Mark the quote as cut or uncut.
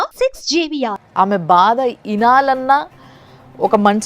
cut